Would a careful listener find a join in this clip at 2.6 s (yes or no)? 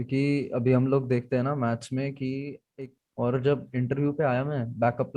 yes